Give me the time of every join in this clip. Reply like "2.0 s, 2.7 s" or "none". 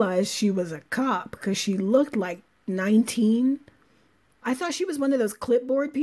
4.4 s